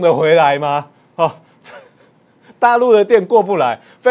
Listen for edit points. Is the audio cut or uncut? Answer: uncut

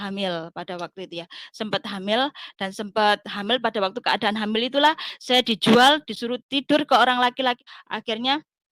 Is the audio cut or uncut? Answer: cut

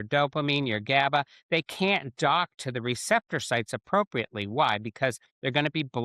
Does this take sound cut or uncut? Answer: uncut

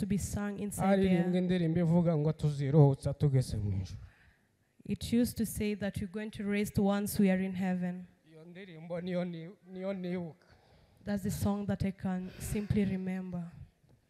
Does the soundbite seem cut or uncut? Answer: uncut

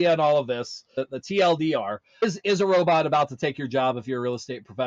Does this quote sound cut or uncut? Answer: cut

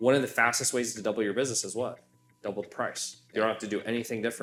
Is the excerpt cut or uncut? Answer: uncut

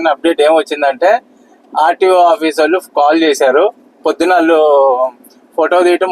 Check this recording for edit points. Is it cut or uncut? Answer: uncut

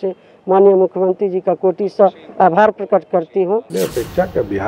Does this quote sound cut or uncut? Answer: cut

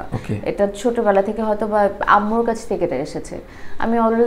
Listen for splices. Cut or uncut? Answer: uncut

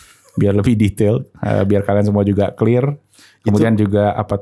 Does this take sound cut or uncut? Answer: uncut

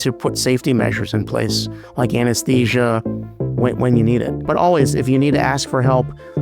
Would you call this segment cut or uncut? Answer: uncut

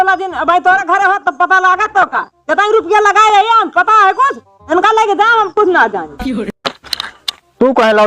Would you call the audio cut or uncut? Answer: cut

